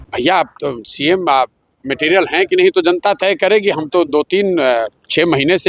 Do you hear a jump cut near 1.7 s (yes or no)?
no